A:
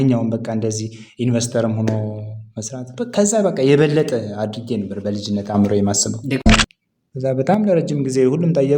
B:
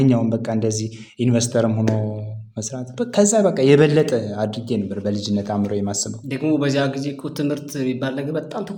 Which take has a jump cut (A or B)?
A